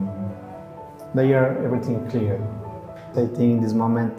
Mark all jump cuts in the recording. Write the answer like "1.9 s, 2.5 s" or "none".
3.1 s